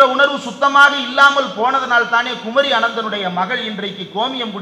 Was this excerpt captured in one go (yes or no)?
yes